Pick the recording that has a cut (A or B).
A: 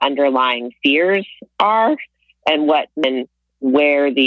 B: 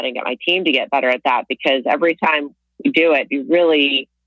A